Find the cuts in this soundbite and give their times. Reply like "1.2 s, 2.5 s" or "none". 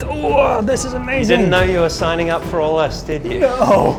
none